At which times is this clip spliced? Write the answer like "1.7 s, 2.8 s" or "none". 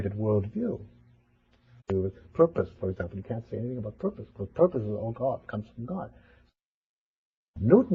none